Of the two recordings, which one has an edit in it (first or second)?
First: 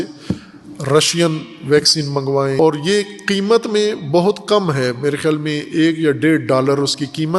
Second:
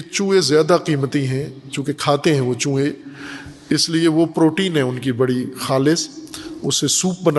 first